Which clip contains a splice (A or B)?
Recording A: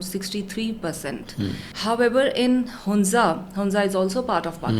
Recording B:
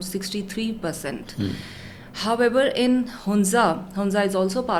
A